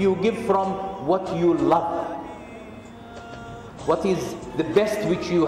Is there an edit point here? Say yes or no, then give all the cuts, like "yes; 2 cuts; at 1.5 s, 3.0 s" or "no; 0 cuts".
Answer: no; 0 cuts